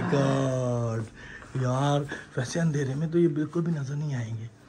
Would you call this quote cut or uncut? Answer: uncut